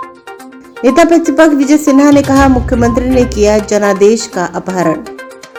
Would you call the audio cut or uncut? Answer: uncut